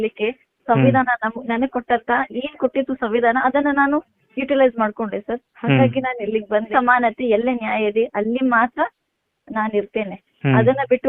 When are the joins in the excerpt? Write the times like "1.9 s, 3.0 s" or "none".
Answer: 6.7 s